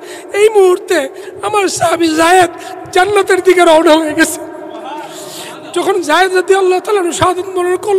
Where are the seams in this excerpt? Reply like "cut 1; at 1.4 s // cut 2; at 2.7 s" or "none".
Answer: none